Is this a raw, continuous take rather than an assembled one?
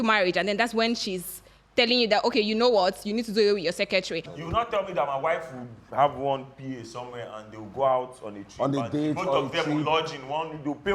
no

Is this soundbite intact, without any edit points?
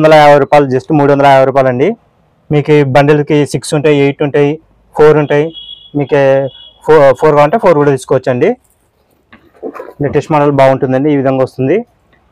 yes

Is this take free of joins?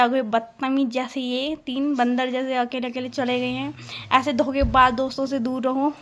yes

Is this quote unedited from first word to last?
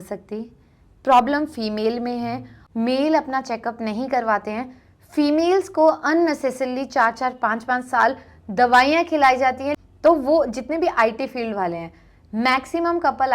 no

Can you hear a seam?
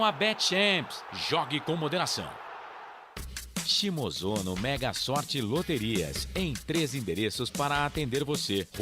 yes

